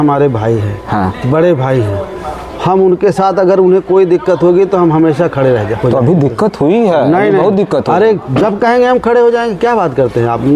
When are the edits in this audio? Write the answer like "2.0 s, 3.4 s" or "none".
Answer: none

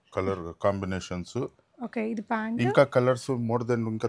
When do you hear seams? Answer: none

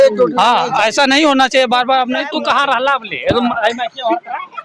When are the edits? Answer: 2.2 s

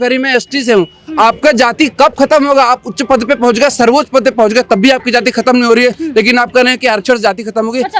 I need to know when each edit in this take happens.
none

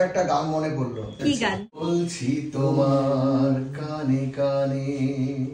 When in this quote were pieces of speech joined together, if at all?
1.8 s

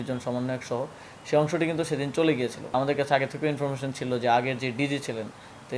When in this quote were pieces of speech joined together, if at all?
2.7 s

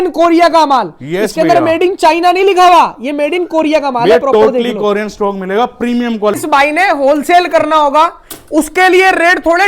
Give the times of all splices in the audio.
6.3 s

